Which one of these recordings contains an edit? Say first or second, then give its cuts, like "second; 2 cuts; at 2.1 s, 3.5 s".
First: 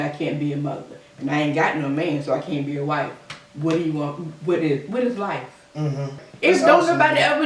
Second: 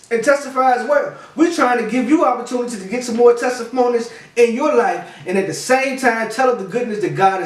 first; 1 cut; at 6.2 s